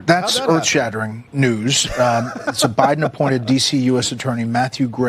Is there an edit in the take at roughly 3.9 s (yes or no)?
no